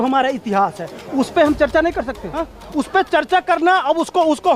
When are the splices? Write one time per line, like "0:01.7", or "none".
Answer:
0:02.3